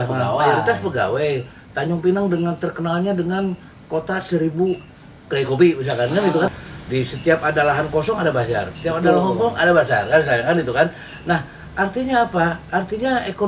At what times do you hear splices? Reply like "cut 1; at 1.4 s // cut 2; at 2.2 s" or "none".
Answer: cut 1; at 6.7 s

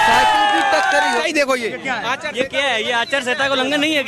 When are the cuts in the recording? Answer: cut 1; at 1.2 s

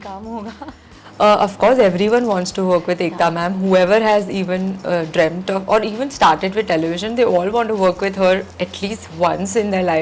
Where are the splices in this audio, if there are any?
none

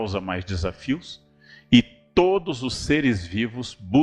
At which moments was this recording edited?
none

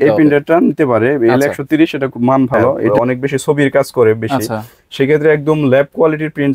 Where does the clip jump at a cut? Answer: cut 1; at 2.9 s

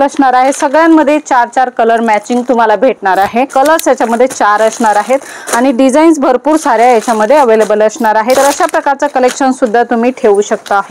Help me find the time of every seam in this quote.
cut 1; at 3.5 s // cut 2; at 8.4 s

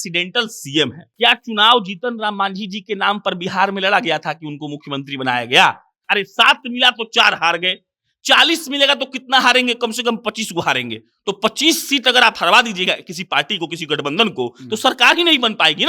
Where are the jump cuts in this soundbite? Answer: cut 1; at 1.0 s // cut 2; at 6.1 s

